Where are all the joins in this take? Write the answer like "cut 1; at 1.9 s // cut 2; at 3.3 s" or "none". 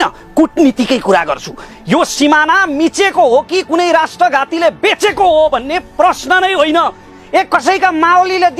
cut 1; at 1.7 s